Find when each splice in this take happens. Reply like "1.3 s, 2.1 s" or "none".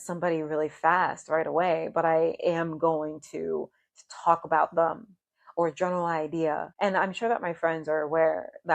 6.7 s